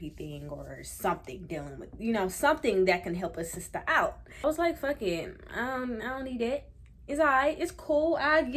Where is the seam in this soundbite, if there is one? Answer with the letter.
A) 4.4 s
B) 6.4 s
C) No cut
A